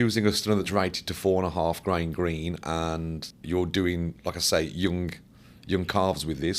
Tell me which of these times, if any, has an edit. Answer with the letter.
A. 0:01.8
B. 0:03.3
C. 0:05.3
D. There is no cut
B